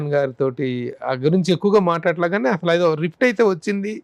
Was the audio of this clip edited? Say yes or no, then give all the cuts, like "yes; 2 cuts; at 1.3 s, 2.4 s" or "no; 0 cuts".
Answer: no; 0 cuts